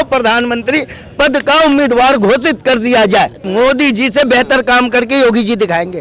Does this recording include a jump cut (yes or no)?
yes